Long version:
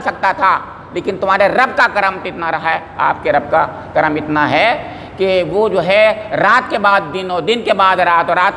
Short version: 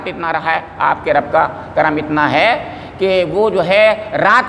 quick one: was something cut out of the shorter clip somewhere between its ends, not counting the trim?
no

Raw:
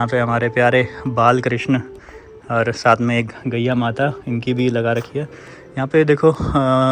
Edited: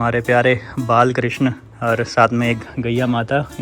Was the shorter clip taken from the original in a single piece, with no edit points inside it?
no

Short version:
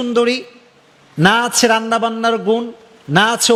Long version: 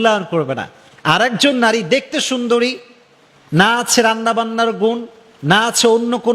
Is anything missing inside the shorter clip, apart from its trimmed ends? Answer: no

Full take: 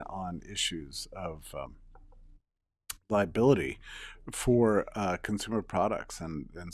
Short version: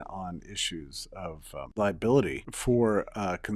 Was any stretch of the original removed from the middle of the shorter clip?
yes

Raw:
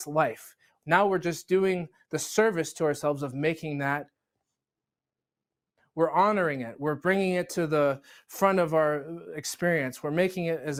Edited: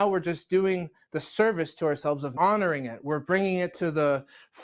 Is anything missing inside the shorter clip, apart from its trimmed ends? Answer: yes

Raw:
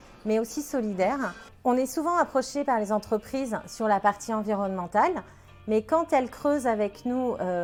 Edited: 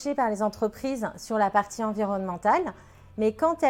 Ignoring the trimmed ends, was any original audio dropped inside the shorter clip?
no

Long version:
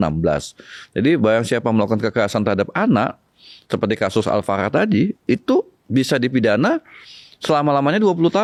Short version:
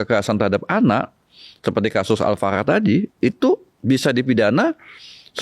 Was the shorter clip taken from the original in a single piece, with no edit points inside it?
yes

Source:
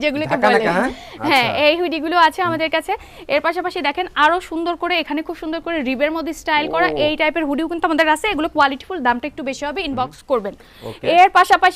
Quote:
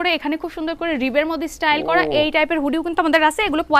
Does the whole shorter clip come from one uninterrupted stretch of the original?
yes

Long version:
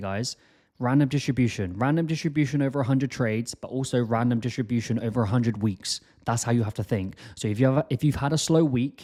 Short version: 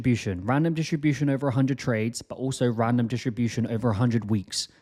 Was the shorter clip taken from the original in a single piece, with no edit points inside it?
yes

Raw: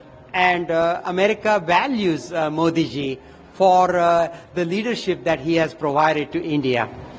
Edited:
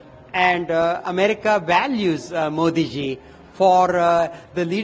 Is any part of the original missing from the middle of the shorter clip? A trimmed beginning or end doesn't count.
no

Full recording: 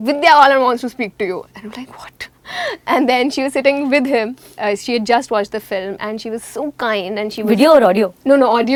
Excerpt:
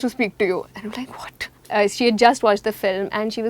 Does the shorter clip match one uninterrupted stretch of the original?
no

